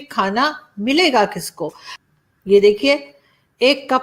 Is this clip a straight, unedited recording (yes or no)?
no